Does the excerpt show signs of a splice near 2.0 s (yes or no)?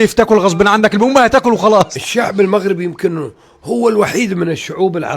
yes